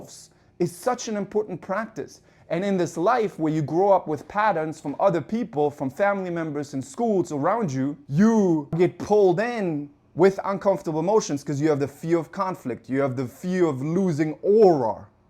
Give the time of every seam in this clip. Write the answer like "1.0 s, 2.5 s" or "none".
8.0 s, 8.8 s

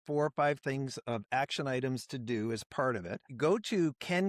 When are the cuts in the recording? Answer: 3.3 s

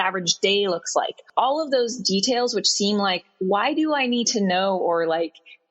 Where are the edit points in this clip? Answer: 1.2 s

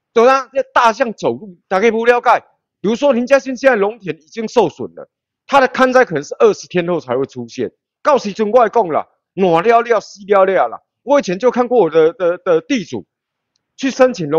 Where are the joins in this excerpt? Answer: none

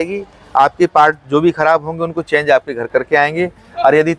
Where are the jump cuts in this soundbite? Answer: none

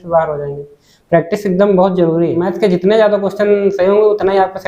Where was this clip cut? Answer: 2.5 s

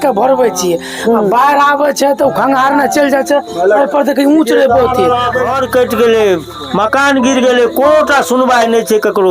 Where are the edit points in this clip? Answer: 5.4 s

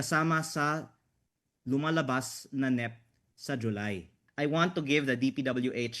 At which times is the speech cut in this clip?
4.2 s

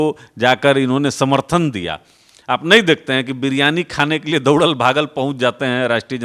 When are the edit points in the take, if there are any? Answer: none

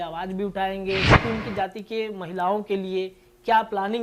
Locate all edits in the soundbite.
1.1 s

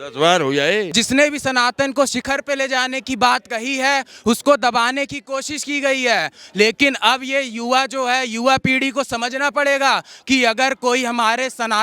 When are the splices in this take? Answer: 0.9 s

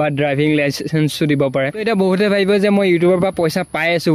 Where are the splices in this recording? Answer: 1.8 s

